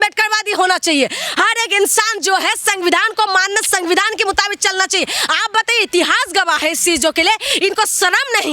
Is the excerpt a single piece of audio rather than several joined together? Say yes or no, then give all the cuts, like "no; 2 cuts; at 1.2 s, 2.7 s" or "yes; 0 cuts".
yes; 0 cuts